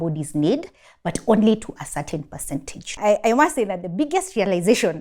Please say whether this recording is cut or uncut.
cut